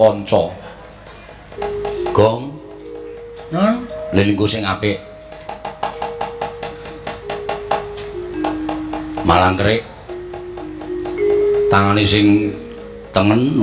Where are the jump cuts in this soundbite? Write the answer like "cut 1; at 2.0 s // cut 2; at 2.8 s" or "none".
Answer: cut 1; at 1.5 s